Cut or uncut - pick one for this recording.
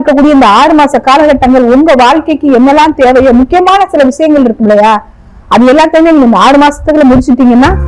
uncut